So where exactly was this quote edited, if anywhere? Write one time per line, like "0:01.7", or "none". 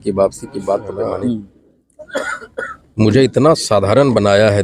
0:01.0